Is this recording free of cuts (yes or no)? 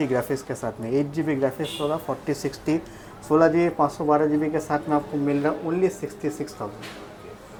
yes